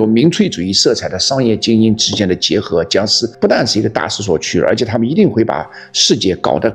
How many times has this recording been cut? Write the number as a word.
one